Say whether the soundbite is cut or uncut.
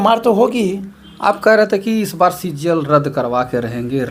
uncut